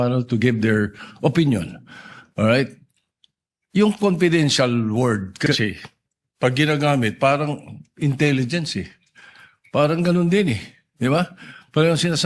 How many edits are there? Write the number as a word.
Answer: zero